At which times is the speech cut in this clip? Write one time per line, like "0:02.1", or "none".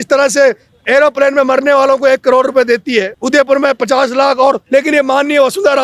0:03.2
0:04.6